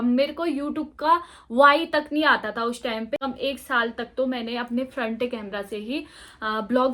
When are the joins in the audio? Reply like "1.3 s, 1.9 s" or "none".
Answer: 3.2 s